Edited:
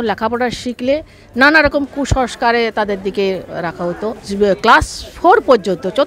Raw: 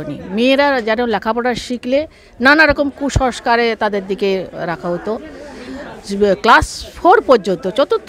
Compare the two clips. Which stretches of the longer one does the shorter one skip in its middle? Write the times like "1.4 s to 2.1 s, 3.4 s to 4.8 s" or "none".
5.3 s to 6.0 s